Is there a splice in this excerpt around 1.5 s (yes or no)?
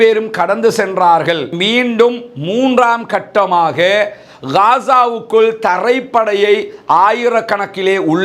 yes